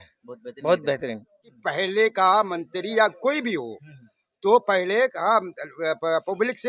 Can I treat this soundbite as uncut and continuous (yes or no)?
no